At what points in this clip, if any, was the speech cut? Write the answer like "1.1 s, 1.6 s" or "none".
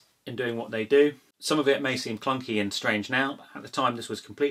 1.3 s